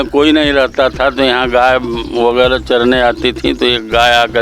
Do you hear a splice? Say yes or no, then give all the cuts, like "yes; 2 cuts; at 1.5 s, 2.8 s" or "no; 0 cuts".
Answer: no; 0 cuts